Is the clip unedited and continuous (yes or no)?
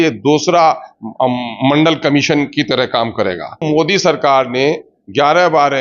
no